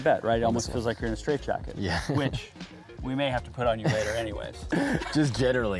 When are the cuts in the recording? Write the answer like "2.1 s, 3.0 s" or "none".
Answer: none